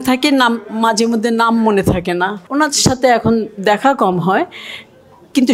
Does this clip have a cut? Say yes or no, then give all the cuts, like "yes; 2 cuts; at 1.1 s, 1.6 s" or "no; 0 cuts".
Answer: yes; 1 cut; at 2.5 s